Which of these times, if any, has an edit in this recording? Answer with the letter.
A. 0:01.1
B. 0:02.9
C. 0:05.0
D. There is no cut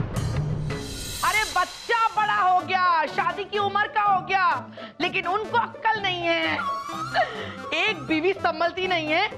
A